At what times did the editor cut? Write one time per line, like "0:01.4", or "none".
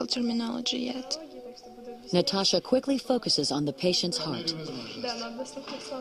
none